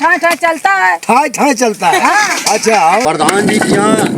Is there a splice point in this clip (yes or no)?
yes